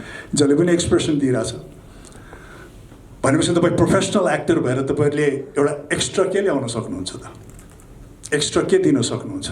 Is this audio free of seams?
yes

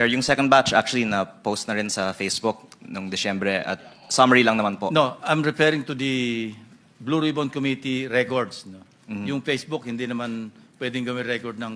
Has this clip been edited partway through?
no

